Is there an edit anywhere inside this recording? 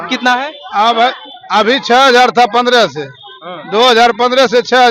no; 0 cuts

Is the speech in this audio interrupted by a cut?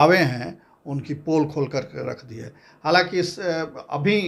no; 0 cuts

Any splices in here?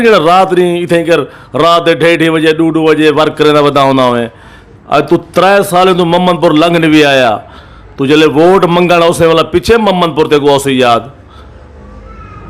no; 0 cuts

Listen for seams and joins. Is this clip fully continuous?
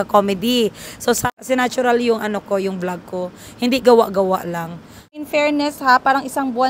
no; 2 cuts; at 1.3 s, 5.2 s

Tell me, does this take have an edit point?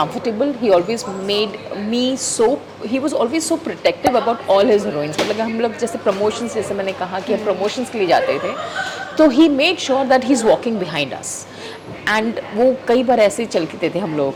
no; 0 cuts

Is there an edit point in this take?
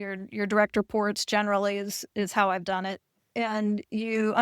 yes; 1 cut; at 3.2 s

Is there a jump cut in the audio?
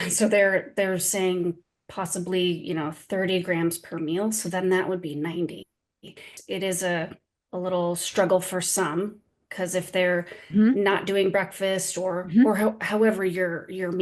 yes; 1 cut; at 6.3 s

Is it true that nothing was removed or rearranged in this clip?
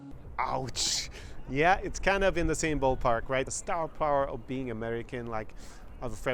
no; 1 cut; at 3.5 s

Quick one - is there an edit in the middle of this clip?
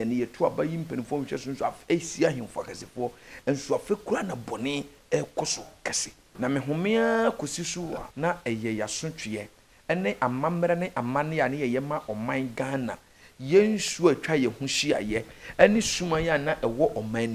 yes; 2 cuts; at 6.2 s, 8.1 s

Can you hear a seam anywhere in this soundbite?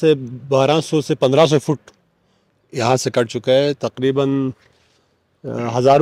no; 0 cuts

